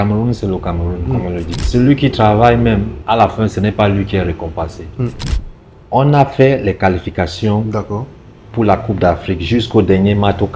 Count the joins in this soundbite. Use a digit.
3